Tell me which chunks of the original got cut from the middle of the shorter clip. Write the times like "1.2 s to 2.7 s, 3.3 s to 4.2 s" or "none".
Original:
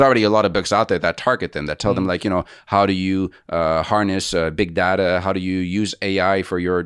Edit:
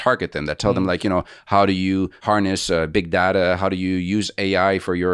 3.4 s to 3.9 s